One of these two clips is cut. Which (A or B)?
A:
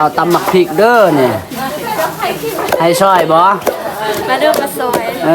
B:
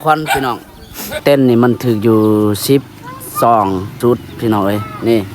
B